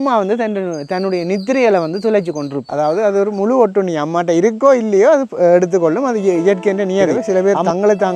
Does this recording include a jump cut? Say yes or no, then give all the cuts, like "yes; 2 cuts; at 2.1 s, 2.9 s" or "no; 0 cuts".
yes; 2 cuts; at 2.7 s, 7.2 s